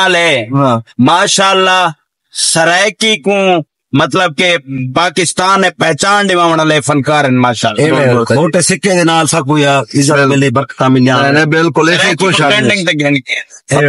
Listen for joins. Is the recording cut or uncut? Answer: uncut